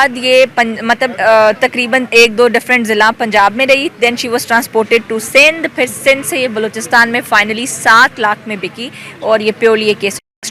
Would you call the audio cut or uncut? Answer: uncut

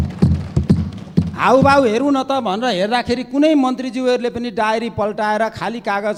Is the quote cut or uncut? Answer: uncut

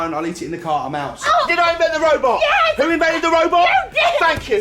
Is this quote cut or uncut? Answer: cut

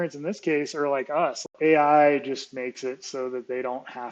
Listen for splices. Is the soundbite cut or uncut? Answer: cut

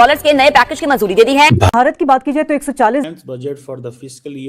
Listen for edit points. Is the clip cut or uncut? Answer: cut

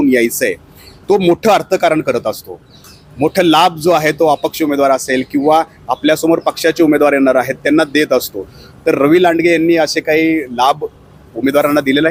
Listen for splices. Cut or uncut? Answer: uncut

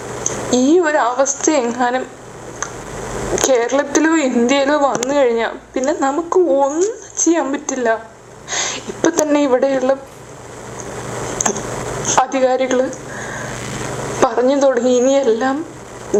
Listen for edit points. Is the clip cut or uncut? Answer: uncut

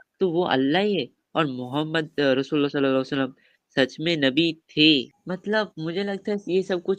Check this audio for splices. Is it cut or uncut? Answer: cut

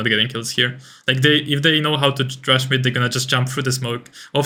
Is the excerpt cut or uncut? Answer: uncut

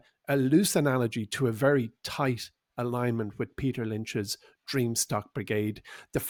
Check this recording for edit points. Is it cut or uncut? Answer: uncut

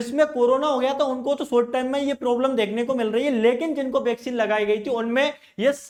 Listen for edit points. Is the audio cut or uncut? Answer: uncut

